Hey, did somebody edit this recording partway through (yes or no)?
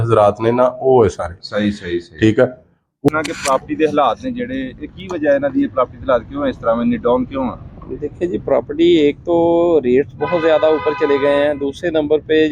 yes